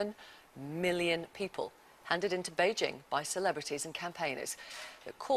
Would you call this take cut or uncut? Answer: cut